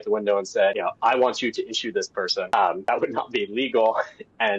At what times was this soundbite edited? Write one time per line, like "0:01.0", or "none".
0:00.8
0:02.7